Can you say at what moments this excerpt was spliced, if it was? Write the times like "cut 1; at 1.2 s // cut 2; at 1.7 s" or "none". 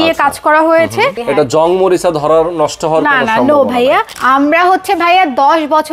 cut 1; at 1.2 s // cut 2; at 4.1 s